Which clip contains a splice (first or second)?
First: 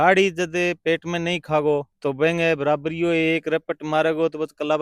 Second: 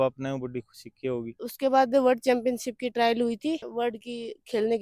second